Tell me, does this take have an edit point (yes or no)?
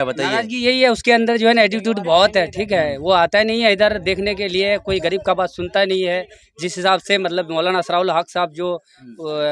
no